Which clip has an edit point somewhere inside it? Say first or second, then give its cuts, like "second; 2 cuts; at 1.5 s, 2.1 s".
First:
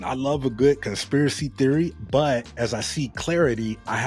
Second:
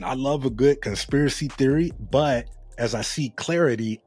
first; 1 cut; at 2.5 s